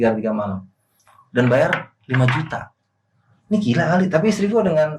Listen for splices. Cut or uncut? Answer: uncut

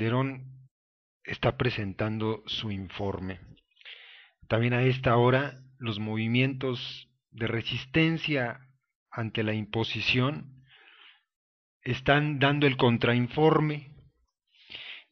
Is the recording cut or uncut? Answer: cut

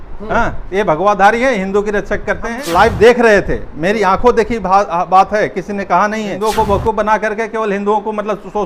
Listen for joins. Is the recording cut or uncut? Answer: cut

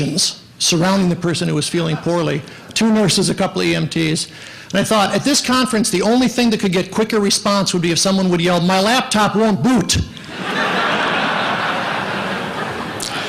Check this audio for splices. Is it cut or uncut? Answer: uncut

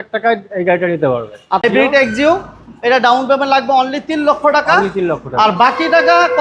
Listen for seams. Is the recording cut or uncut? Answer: cut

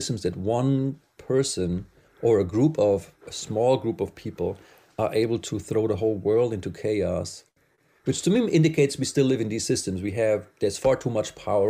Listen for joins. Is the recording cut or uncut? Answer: uncut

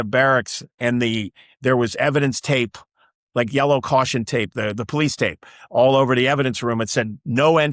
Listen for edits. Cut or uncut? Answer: uncut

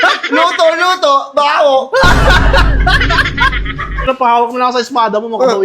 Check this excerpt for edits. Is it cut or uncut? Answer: cut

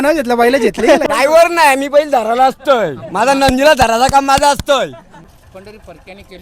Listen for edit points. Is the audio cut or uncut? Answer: cut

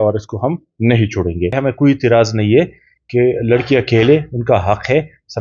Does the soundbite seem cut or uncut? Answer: cut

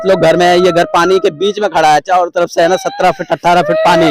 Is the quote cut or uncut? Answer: uncut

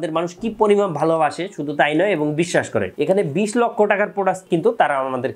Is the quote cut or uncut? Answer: cut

